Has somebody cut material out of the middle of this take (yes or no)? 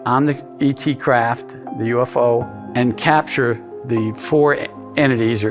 yes